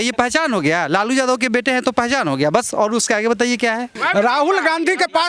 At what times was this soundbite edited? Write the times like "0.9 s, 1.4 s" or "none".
4.0 s